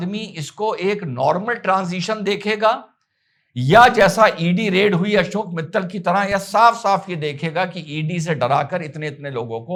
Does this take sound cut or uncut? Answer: uncut